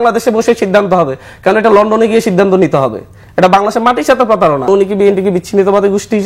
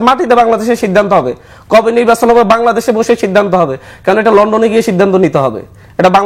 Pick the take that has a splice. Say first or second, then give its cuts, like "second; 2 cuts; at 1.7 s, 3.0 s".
first; 1 cut; at 4.7 s